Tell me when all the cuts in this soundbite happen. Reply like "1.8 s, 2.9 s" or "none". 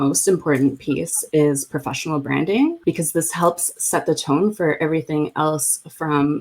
2.8 s

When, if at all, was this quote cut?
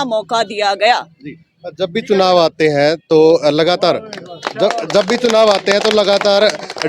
none

